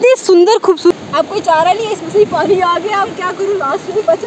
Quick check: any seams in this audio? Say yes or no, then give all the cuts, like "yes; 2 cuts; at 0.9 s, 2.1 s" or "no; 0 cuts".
yes; 1 cut; at 0.9 s